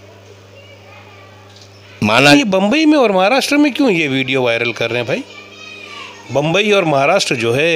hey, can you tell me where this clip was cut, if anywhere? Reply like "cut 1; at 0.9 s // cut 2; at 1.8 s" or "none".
cut 1; at 2.3 s